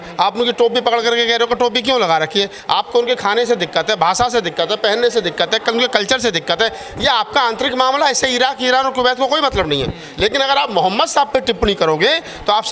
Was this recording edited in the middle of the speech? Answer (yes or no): no